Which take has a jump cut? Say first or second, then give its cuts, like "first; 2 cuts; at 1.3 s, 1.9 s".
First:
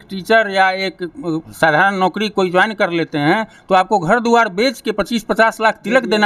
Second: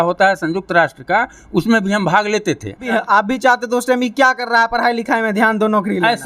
second; 1 cut; at 2.8 s